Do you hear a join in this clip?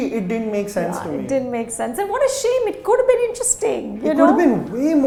no; 0 cuts

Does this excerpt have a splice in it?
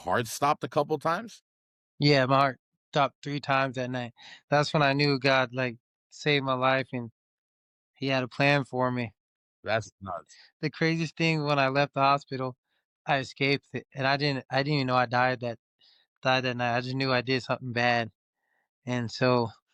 no; 0 cuts

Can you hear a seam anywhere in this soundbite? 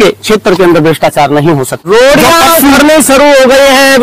yes; 1 cut; at 1.8 s

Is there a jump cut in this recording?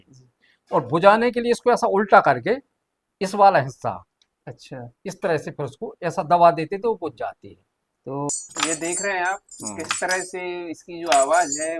yes; 1 cut; at 8.3 s

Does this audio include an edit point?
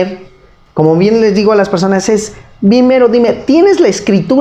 no; 0 cuts

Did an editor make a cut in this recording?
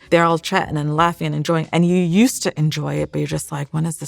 no; 0 cuts

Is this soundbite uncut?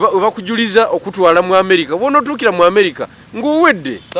yes; 0 cuts

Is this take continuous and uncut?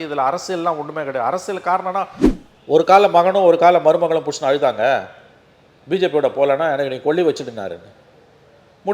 no; 1 cut; at 2.2 s

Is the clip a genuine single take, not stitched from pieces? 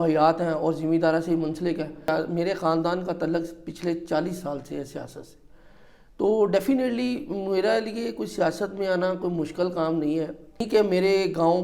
no; 2 cuts; at 2.1 s, 10.6 s

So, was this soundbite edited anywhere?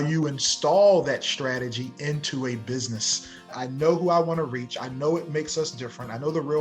yes; 1 cut; at 3.5 s

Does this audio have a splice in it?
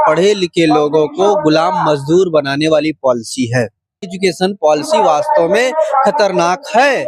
yes; 1 cut; at 4.0 s

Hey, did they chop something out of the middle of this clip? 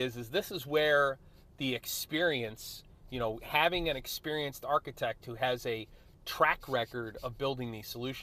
no; 0 cuts

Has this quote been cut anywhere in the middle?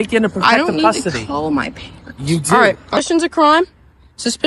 no; 0 cuts

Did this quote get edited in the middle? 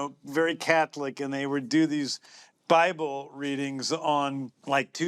no; 0 cuts

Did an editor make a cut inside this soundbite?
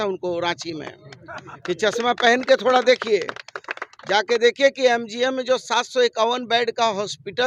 no; 0 cuts

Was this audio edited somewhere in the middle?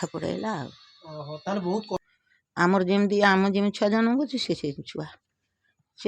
yes; 1 cut; at 2.0 s

